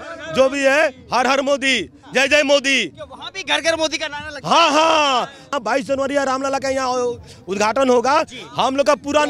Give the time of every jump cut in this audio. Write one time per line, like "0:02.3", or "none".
0:05.5